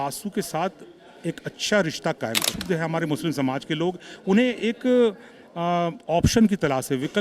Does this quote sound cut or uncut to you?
cut